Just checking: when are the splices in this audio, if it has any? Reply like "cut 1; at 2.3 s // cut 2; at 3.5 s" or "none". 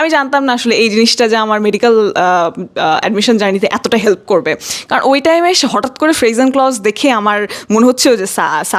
none